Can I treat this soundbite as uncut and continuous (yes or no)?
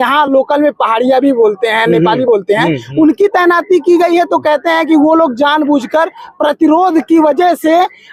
yes